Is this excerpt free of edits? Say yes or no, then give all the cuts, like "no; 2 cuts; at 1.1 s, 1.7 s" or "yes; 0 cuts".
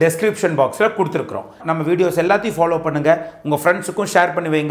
no; 1 cut; at 1.6 s